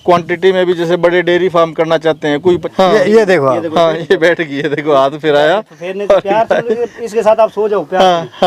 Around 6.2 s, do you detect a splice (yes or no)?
no